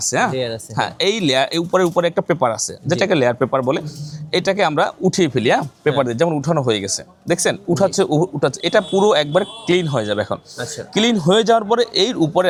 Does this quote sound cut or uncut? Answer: uncut